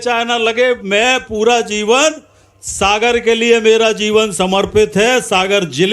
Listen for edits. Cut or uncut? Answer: uncut